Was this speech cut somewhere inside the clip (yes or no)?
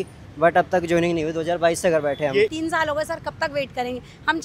yes